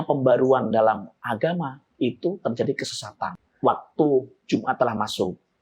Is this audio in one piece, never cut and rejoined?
no; 1 cut; at 3.4 s

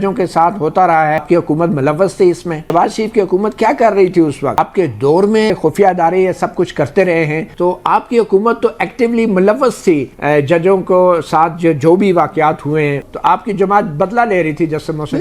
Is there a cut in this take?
yes; 6 cuts; at 1.2 s, 2.7 s, 4.6 s, 5.5 s, 7.5 s, 13.1 s

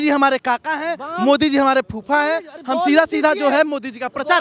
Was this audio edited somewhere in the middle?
no; 0 cuts

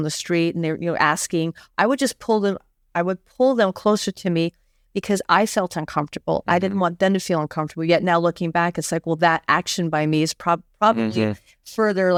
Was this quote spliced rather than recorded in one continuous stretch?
no; 0 cuts

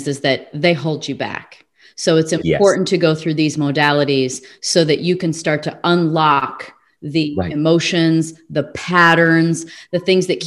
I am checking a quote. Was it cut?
no; 0 cuts

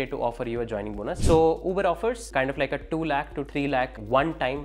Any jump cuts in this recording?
yes; 3 cuts; at 1.2 s, 2.2 s, 3.6 s

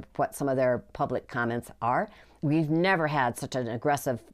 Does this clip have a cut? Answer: yes; 1 cut; at 2.3 s

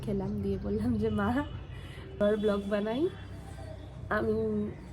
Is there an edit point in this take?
yes; 1 cut; at 2.2 s

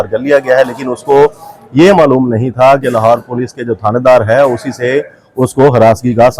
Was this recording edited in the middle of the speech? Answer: no; 0 cuts

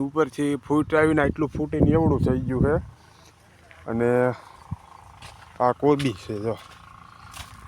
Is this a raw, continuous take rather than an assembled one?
yes; 0 cuts

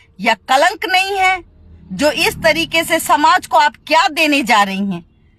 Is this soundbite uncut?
yes; 0 cuts

